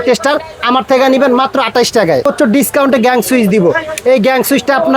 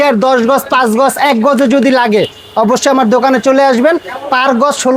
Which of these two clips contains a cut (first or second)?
first